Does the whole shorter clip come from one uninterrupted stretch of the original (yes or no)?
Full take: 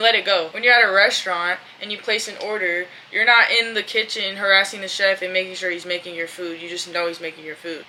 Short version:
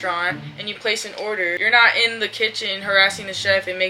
no